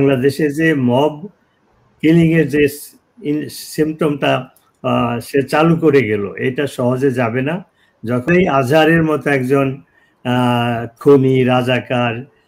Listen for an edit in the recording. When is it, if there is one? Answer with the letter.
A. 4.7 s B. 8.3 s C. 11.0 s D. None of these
B